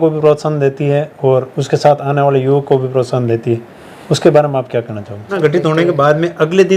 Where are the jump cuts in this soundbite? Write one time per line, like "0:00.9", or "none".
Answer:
0:05.4